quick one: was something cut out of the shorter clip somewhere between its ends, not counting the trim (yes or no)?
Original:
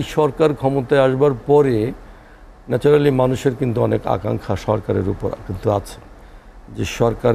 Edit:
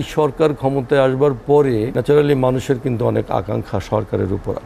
yes